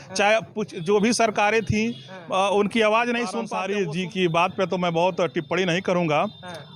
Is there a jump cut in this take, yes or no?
yes